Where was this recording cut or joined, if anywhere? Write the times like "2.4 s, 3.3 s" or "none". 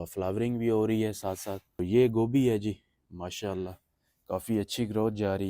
1.8 s